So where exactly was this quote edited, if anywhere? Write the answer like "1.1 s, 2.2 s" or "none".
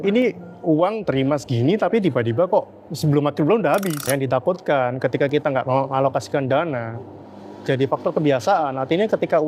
4.0 s